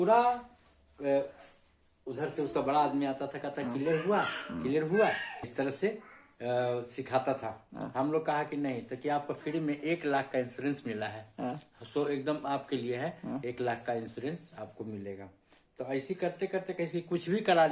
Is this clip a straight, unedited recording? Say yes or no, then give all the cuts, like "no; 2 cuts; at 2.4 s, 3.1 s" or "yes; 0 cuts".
yes; 0 cuts